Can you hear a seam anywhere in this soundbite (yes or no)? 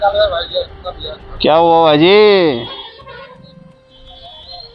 no